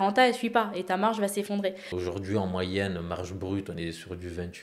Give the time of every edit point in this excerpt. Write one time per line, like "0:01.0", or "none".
0:01.9